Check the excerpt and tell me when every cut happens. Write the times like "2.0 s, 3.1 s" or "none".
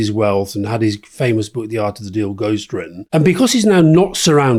none